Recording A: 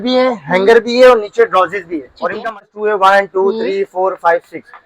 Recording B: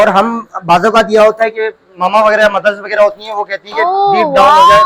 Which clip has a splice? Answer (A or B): A